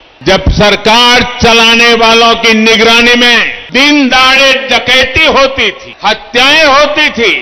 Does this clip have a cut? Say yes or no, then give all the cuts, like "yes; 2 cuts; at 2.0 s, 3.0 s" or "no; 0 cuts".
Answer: yes; 2 cuts; at 3.6 s, 5.9 s